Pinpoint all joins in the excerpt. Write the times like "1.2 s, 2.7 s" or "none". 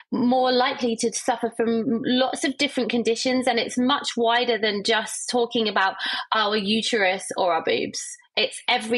none